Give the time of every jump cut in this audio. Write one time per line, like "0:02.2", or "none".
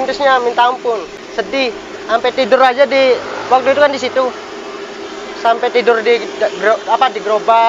0:01.0